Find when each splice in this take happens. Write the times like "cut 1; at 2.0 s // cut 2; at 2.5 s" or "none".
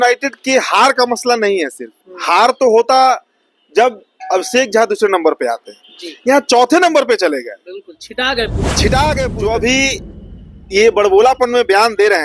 cut 1; at 9.3 s